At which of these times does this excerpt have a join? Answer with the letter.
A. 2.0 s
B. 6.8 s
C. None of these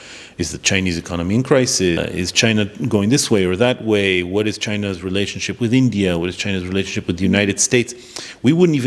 A